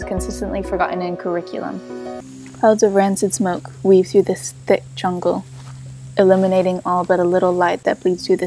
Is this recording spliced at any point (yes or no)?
yes